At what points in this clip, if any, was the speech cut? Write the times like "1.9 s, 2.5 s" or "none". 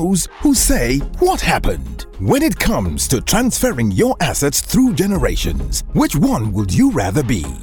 none

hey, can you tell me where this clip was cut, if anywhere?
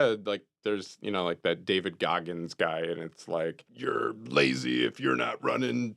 3.7 s

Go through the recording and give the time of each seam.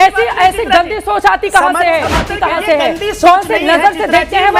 2.3 s

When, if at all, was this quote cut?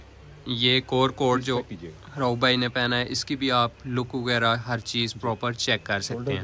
none

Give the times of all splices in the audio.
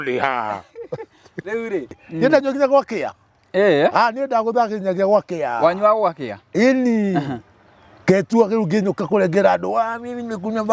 2.0 s

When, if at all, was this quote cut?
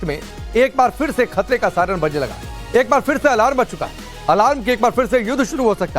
2.1 s

